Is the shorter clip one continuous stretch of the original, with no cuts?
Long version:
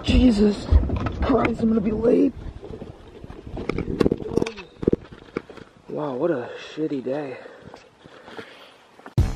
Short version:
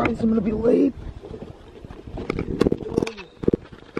yes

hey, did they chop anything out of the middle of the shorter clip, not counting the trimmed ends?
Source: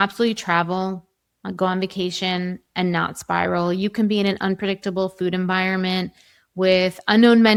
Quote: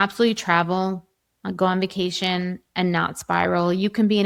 no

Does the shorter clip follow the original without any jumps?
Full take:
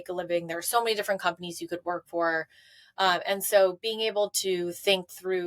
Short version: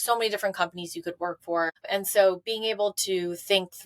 no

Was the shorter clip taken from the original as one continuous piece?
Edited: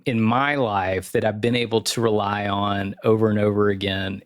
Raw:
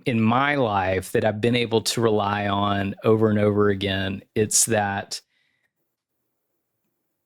yes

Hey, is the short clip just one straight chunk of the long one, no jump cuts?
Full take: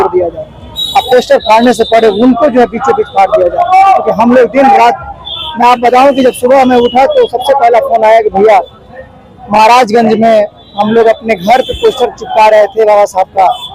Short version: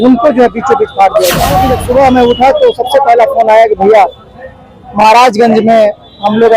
no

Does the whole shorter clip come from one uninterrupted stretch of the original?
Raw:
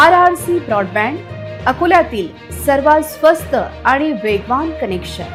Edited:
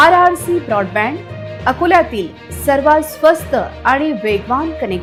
yes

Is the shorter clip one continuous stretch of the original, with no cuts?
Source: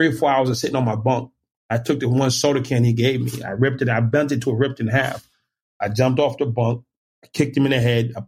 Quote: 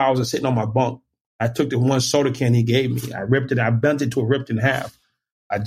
yes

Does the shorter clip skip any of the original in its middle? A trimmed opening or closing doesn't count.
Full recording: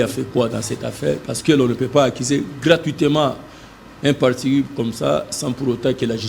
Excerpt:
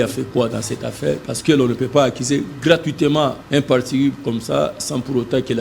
yes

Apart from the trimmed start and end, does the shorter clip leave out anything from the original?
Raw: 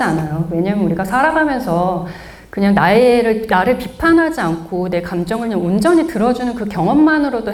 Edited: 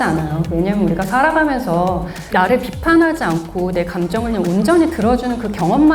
yes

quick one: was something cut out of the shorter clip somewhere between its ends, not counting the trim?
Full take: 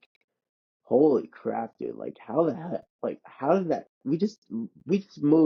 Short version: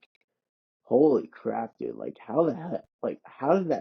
no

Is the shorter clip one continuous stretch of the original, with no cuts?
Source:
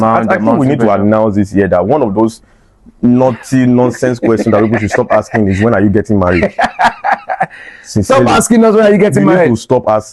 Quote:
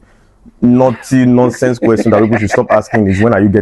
yes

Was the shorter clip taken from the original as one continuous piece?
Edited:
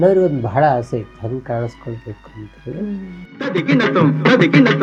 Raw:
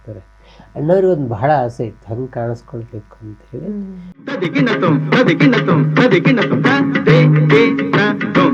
yes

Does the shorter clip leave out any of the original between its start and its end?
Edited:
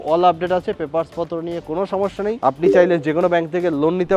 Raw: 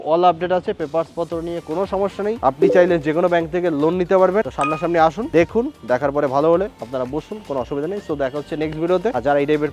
no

